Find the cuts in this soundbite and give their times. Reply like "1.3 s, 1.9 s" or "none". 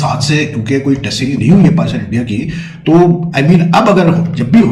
none